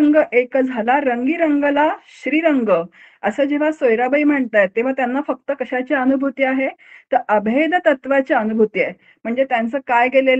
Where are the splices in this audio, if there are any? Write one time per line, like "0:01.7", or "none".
none

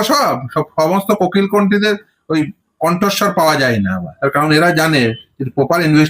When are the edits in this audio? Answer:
0:04.1

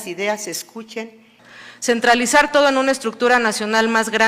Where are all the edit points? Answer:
0:01.4

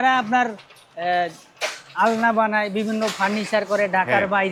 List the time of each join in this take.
none

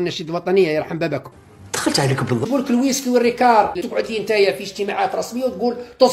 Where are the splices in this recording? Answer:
0:02.4
0:03.8

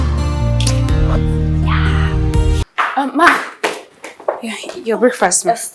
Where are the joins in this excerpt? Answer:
0:02.6

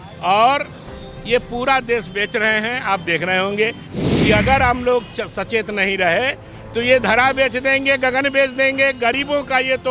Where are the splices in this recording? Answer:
0:03.9

